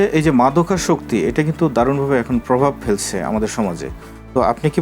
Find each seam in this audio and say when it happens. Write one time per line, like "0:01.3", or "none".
none